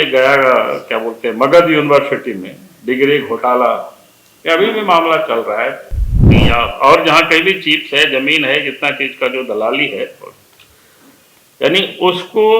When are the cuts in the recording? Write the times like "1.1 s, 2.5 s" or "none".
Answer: 6.4 s